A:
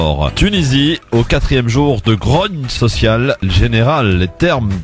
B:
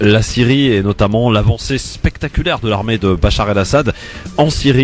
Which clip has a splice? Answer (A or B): A